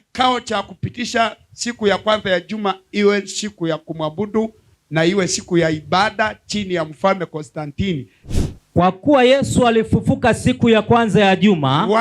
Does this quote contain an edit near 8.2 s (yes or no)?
yes